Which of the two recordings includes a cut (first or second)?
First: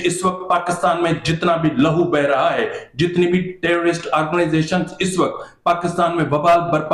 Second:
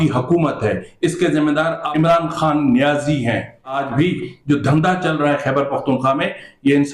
second